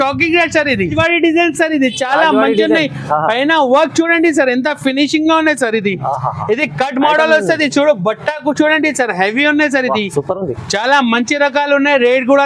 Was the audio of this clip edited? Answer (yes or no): yes